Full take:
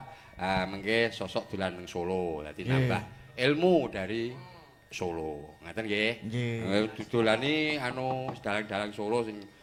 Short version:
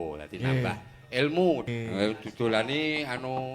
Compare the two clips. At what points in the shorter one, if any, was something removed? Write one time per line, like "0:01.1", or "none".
0:01.7